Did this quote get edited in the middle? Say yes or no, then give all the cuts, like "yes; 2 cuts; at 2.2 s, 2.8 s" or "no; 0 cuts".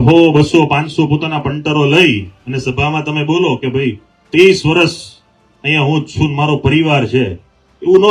no; 0 cuts